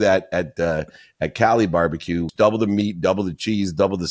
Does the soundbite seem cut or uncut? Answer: cut